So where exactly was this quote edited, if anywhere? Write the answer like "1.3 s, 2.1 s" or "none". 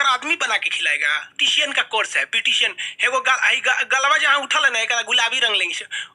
1.3 s